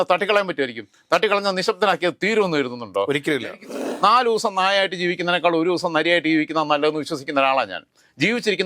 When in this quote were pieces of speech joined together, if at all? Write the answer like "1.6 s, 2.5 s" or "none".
3.8 s